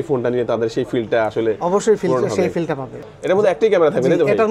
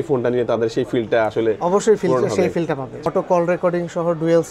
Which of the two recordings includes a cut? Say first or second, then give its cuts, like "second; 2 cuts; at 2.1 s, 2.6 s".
second; 1 cut; at 3.0 s